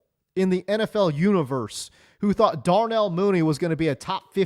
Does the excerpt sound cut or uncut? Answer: uncut